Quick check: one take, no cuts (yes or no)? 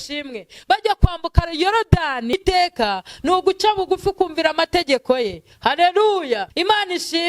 no